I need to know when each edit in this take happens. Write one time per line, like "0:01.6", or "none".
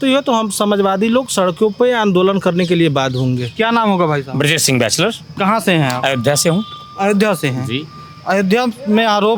none